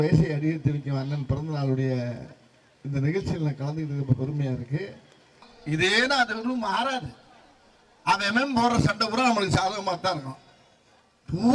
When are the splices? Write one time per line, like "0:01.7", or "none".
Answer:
0:05.5